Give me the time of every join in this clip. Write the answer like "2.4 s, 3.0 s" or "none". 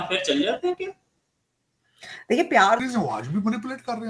2.8 s